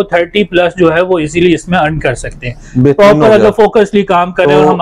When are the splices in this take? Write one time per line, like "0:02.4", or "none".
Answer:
none